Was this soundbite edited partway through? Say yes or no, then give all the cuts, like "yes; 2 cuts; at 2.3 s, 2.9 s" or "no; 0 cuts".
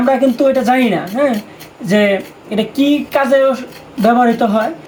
no; 0 cuts